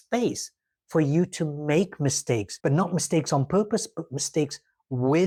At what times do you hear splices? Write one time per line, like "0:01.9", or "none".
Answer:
none